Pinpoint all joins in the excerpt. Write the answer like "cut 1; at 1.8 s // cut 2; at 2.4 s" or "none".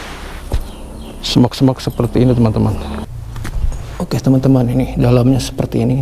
cut 1; at 3.0 s

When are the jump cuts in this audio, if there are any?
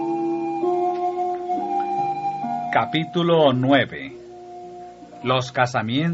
none

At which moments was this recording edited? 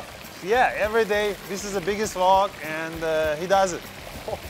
none

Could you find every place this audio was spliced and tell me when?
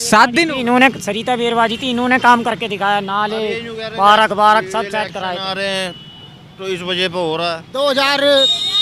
cut 1; at 7.6 s

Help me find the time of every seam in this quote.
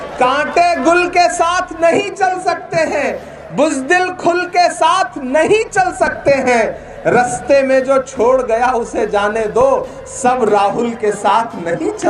none

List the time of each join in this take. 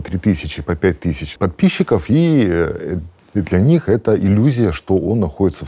cut 1; at 1.3 s

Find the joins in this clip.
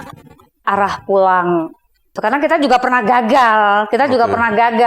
cut 1; at 2.1 s

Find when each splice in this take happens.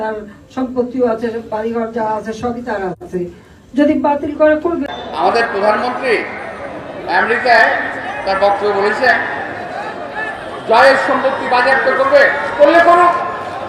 cut 1; at 4.8 s

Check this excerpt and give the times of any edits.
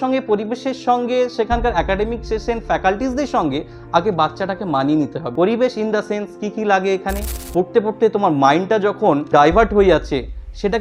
cut 1; at 5.2 s // cut 2; at 7.4 s // cut 3; at 9.3 s

